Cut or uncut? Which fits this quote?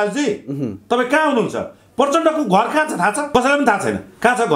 cut